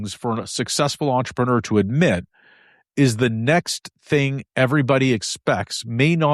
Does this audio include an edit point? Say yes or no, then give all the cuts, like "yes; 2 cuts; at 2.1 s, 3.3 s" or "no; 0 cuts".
no; 0 cuts